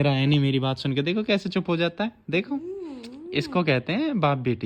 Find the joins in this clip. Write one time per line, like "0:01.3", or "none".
none